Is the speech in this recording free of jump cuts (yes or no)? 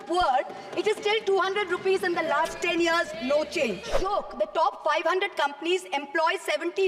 no